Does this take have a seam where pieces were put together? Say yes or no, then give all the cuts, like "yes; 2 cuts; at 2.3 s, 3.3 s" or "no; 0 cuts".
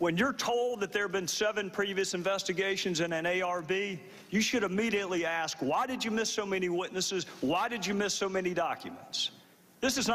yes; 1 cut; at 8.8 s